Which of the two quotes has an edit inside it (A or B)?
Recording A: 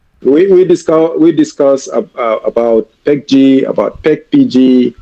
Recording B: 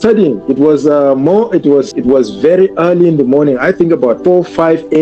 B